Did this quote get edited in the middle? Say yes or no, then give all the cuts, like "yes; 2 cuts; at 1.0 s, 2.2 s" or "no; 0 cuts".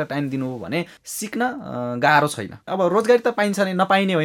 yes; 1 cut; at 2.6 s